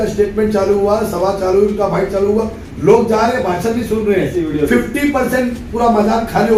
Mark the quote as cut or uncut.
uncut